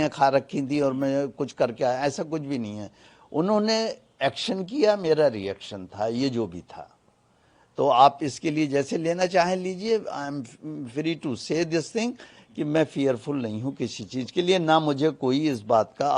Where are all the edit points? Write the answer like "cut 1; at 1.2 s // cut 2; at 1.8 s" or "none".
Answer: none